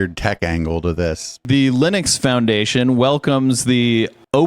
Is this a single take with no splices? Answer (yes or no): no